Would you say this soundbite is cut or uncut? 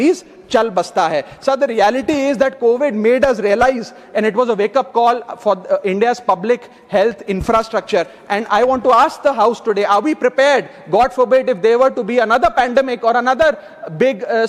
uncut